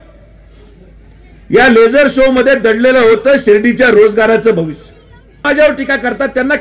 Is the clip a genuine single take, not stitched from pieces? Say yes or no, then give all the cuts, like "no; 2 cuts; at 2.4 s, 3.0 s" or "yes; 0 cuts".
no; 1 cut; at 5.4 s